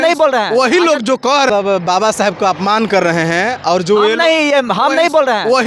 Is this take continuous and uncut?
no; 1 cut; at 1.5 s

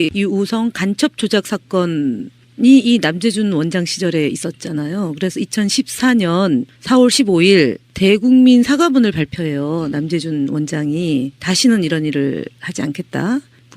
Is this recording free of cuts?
no; 1 cut; at 9.1 s

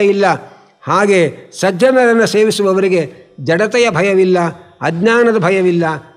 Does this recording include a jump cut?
no; 0 cuts

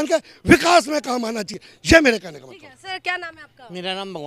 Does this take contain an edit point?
no; 0 cuts

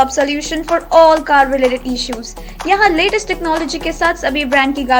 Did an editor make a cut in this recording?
no; 0 cuts

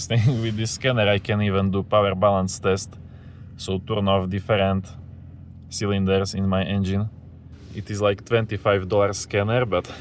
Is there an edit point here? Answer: no; 0 cuts

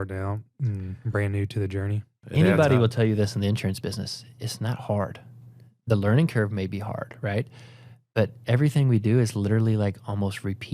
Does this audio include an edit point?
yes; 1 cut; at 2.1 s

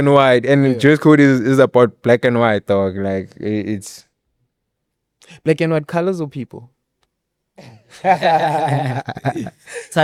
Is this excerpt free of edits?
yes; 0 cuts

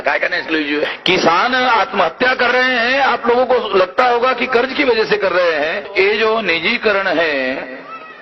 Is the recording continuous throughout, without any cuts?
no; 2 cuts; at 1.0 s, 5.9 s

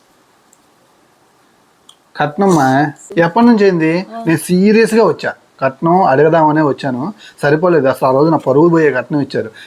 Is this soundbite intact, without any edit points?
no; 1 cut; at 3.0 s

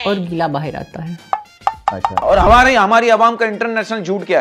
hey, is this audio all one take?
no; 1 cut; at 2.2 s

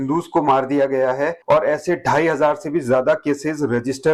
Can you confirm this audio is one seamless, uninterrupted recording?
yes; 0 cuts

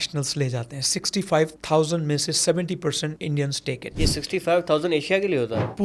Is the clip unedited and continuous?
no; 3 cuts; at 1.6 s, 3.2 s, 3.9 s

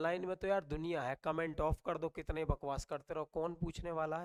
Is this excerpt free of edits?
yes; 0 cuts

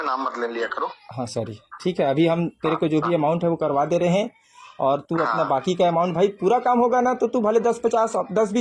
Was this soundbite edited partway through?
no; 0 cuts

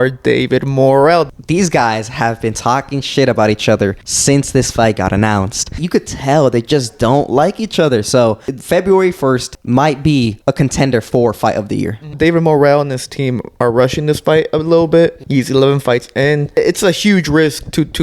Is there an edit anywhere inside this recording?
yes; 9 cuts; at 1.3 s, 4.1 s, 5.8 s, 8.5 s, 9.5 s, 10.4 s, 12.1 s, 15.2 s, 16.6 s

